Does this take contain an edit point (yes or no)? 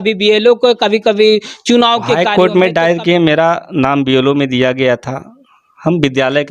yes